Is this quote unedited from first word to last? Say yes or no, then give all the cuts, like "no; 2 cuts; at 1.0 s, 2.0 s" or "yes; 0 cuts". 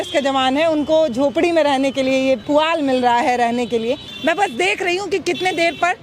no; 1 cut; at 4.1 s